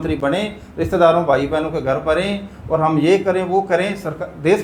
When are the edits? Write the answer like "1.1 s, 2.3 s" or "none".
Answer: none